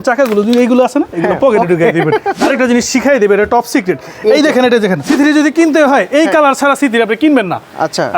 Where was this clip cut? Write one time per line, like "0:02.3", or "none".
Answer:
0:02.3
0:05.0